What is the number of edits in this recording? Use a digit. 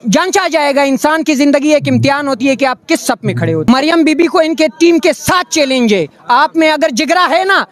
1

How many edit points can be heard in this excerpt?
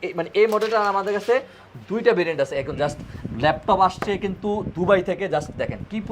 0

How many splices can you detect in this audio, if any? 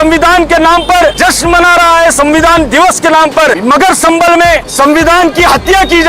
3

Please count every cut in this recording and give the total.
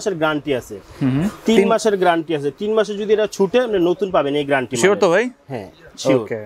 0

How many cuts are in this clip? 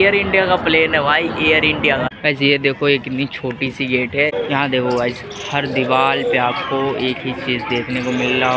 2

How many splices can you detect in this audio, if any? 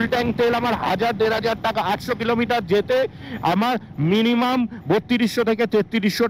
0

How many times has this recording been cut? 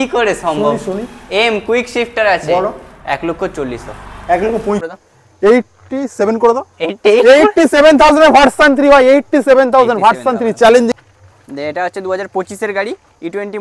2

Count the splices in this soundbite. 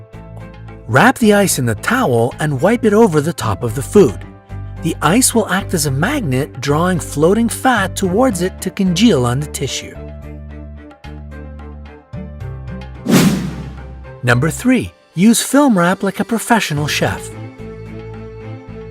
1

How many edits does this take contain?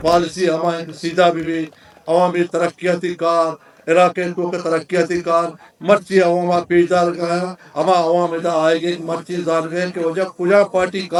0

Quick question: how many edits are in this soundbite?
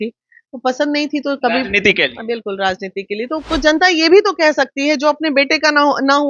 1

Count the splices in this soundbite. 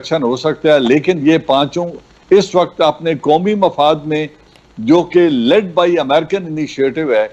0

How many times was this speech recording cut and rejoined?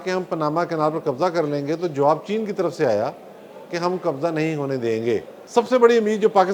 1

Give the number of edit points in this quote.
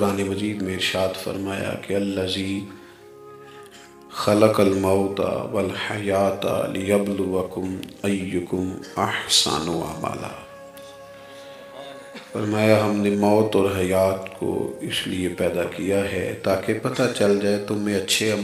0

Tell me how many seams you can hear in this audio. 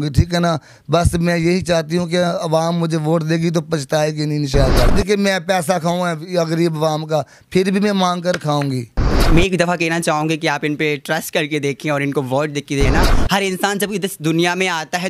3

